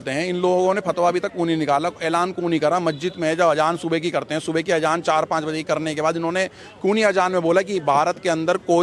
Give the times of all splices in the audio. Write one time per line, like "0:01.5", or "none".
none